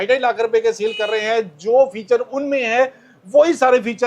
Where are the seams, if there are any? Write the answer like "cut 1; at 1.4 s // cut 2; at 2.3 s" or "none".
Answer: none